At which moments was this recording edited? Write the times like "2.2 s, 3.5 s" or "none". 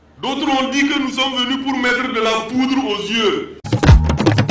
none